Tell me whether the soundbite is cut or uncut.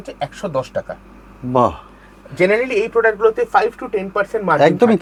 uncut